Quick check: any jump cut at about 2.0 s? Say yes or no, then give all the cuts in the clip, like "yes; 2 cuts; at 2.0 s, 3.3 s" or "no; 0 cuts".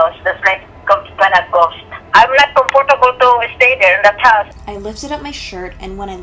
yes; 2 cuts; at 2.0 s, 4.5 s